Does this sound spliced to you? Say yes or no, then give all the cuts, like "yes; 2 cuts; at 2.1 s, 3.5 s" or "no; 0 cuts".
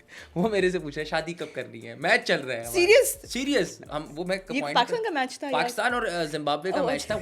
no; 0 cuts